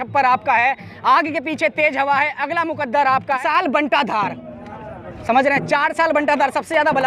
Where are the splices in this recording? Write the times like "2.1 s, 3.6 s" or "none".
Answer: 3.4 s